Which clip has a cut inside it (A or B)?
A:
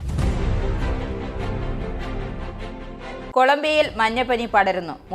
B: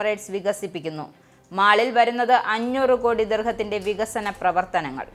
A